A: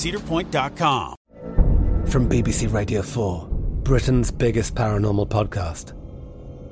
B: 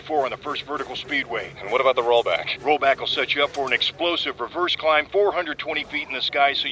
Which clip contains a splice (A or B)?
A